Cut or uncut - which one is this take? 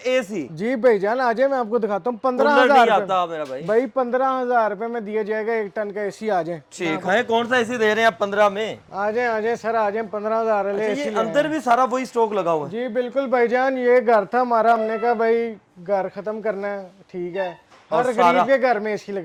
uncut